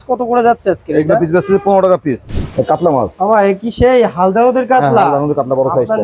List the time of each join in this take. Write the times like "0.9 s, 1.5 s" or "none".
2.3 s